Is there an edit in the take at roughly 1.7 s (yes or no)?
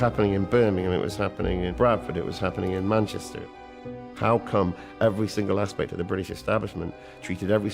yes